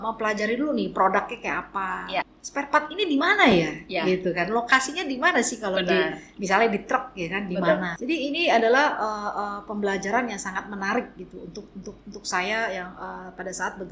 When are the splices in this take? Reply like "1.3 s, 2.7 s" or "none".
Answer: 2.4 s, 7.9 s